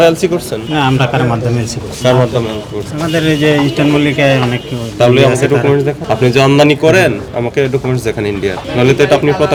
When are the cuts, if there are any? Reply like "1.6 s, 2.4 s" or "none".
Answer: none